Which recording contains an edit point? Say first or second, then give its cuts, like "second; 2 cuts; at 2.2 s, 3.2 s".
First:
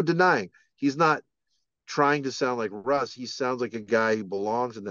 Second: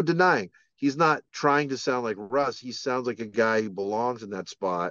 second; 1 cut; at 1.3 s